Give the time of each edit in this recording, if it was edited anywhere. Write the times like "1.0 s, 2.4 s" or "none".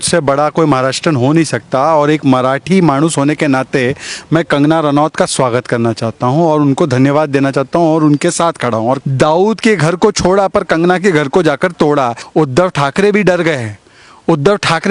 9.0 s, 12.2 s